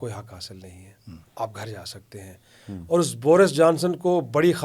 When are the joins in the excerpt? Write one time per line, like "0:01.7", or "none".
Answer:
none